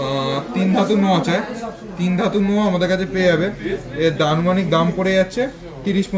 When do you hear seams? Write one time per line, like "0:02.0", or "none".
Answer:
none

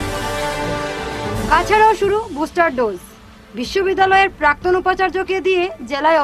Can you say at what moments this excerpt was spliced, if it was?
0:01.0

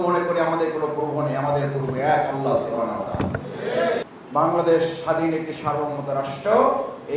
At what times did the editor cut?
0:04.0

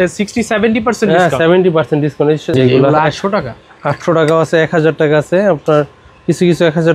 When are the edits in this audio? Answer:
0:02.5

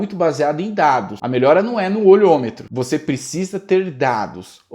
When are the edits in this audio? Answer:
0:01.2
0:02.6

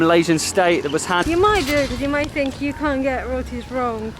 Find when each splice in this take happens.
0:01.2

